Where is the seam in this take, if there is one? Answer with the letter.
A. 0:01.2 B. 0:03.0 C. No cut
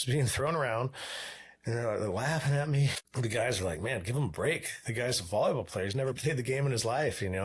B